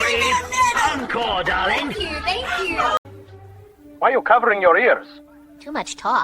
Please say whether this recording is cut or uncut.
cut